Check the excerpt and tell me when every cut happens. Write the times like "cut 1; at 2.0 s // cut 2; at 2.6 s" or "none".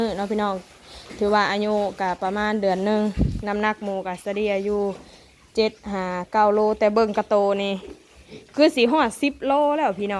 none